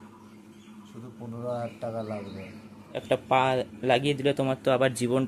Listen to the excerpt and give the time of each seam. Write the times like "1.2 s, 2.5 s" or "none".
2.9 s